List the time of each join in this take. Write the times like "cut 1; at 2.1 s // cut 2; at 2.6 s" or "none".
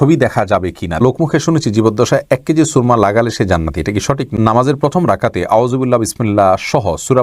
cut 1; at 1.0 s // cut 2; at 4.3 s